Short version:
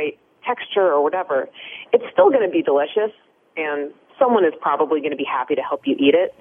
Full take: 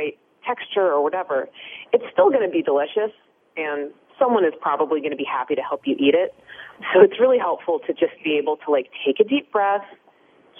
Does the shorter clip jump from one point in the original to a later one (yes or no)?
no